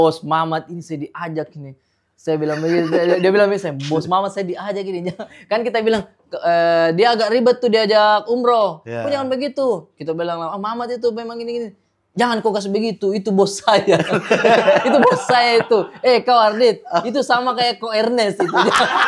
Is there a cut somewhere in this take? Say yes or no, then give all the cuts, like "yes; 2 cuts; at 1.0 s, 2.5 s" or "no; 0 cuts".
no; 0 cuts